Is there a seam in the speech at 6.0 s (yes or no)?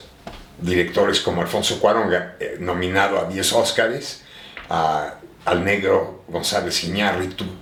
no